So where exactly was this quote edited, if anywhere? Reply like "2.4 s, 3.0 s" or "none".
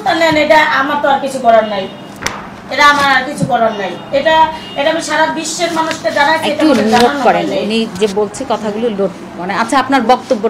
none